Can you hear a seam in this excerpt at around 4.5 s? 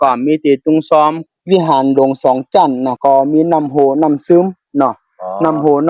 no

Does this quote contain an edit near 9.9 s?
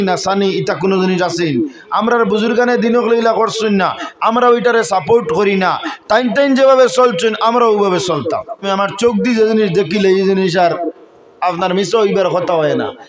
no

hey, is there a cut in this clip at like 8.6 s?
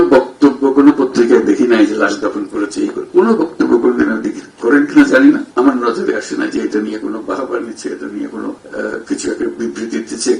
yes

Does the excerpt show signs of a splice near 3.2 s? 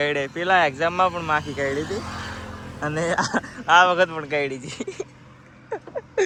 no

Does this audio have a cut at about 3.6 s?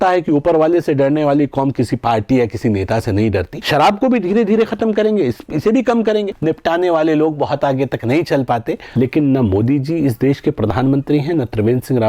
yes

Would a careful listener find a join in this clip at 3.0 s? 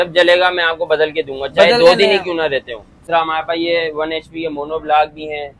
yes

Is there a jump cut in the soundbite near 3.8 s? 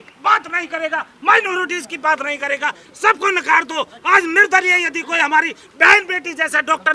no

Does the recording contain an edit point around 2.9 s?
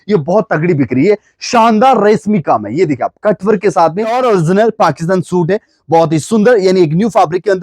no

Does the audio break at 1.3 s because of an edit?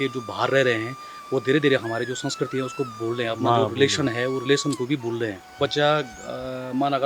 no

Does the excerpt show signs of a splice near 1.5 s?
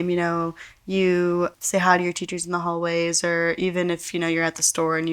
yes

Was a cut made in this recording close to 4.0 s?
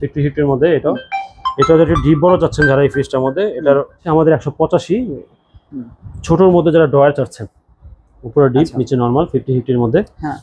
yes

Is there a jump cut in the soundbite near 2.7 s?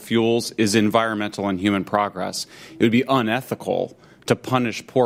no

